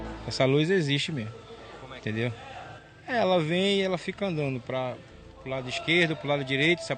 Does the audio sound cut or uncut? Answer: uncut